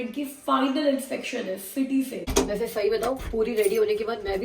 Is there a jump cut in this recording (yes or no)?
yes